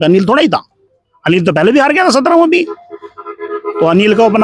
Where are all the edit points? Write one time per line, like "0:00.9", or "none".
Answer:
none